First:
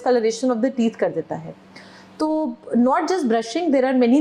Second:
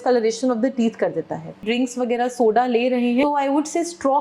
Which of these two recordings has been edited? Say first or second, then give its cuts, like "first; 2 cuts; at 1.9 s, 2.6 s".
second; 2 cuts; at 1.6 s, 3.2 s